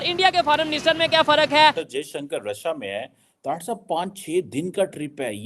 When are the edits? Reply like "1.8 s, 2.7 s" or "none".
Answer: 1.8 s